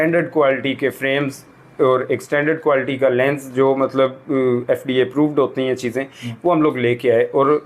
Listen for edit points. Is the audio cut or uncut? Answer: uncut